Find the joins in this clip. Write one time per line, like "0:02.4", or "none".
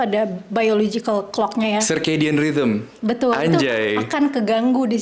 none